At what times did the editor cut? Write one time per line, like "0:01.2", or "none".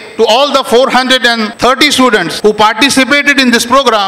0:01.5
0:02.3